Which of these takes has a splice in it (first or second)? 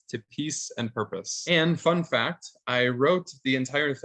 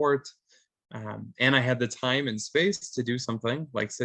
first